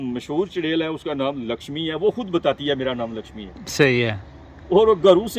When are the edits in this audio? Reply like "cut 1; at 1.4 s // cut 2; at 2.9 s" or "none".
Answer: none